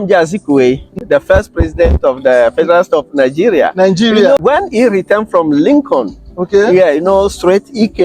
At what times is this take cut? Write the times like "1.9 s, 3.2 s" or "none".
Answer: 0.9 s, 4.4 s